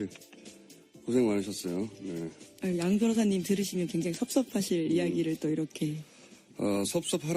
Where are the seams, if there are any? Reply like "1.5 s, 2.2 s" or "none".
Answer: none